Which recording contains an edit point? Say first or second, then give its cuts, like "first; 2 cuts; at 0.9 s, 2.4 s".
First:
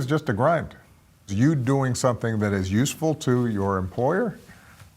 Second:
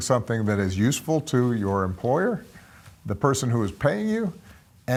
first; 1 cut; at 1.0 s